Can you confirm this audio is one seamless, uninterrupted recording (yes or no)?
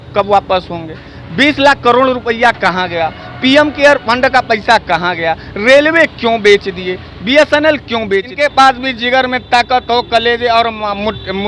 no